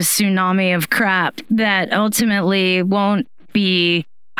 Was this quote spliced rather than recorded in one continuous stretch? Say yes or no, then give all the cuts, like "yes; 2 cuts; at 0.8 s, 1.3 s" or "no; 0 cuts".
no; 0 cuts